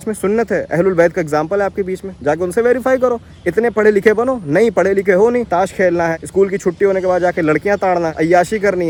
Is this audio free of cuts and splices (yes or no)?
yes